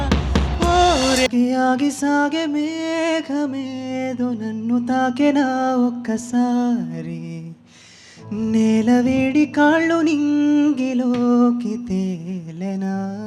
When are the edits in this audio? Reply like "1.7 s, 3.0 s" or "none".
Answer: 1.3 s